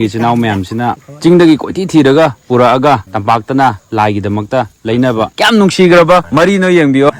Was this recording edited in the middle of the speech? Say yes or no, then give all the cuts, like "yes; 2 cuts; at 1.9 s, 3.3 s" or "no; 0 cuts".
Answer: yes; 4 cuts; at 1.1 s, 3.1 s, 5.3 s, 6.3 s